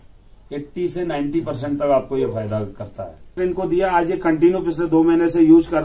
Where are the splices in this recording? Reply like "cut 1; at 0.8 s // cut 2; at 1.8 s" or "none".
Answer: cut 1; at 3.4 s